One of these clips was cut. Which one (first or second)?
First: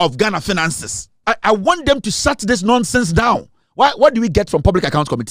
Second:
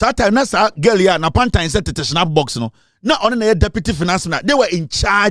first